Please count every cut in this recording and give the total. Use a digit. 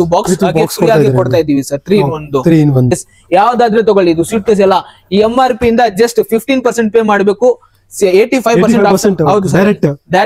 1